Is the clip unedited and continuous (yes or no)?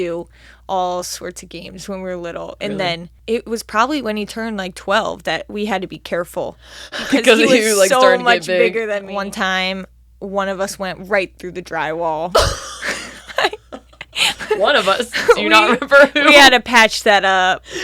no